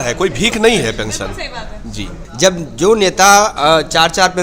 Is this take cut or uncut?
cut